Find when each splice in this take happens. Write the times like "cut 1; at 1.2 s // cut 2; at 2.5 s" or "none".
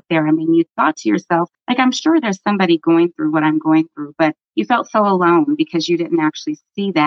none